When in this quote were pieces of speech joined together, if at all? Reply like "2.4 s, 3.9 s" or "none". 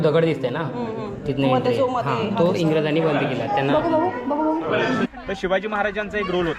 5.1 s